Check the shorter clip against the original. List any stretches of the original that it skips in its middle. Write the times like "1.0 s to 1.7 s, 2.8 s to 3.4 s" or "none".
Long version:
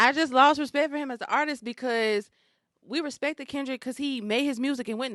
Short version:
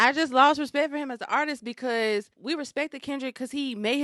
2.3 s to 2.8 s